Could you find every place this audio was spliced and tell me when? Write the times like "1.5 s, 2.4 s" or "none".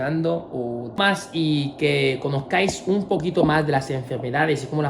1.0 s